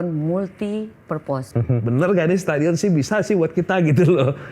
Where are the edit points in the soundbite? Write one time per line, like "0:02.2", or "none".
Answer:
0:01.5